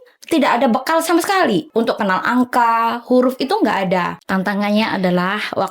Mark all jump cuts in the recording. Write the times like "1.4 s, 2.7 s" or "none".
1.7 s, 4.2 s